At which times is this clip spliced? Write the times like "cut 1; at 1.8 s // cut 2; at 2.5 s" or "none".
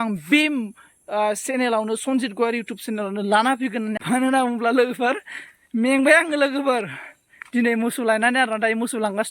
cut 1; at 4.0 s